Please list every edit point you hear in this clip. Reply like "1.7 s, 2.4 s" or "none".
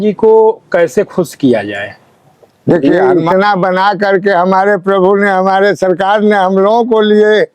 2.8 s